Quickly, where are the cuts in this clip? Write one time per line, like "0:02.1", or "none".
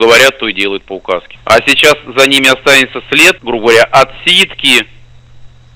0:01.3
0:03.4